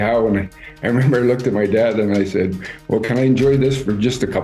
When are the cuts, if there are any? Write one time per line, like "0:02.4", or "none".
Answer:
none